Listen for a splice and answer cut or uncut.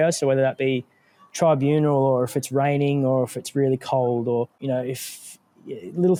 uncut